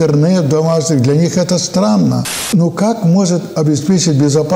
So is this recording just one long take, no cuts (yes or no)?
no